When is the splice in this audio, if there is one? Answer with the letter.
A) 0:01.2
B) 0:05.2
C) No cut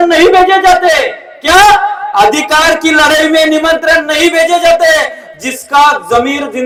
C